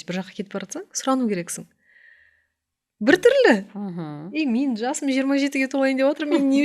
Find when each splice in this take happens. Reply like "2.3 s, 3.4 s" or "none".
none